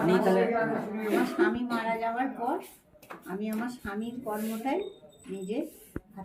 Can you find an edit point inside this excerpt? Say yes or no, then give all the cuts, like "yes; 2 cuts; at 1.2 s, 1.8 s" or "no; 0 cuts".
no; 0 cuts